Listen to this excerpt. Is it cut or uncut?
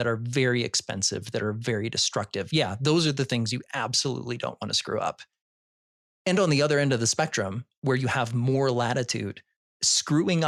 uncut